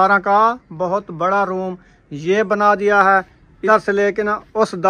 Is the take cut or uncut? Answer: cut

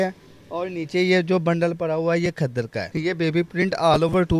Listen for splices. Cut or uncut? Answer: cut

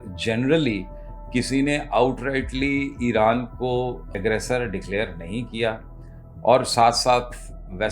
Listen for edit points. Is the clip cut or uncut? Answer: cut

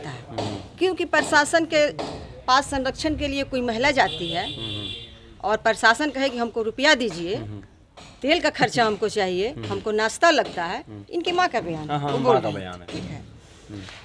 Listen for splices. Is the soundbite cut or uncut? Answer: uncut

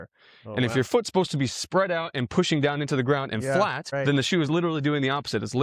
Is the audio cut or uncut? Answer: cut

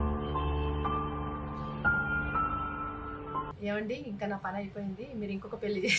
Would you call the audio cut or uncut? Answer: cut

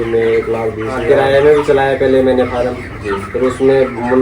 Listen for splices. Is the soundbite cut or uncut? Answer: cut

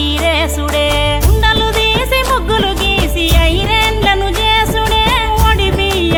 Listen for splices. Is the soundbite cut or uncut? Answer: uncut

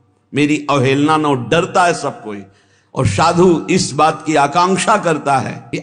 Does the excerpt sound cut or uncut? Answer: uncut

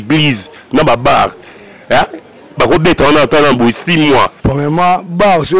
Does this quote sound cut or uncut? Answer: cut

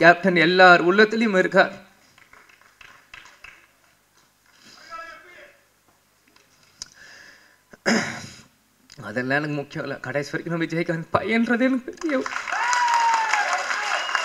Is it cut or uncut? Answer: uncut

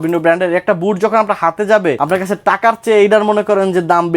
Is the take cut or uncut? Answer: cut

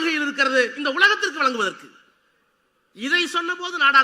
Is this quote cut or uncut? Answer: uncut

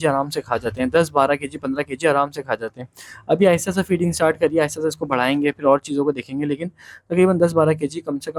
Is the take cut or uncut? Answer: uncut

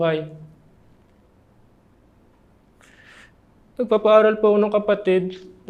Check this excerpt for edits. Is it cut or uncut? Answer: uncut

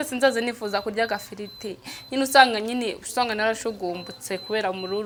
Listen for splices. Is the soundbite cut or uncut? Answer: uncut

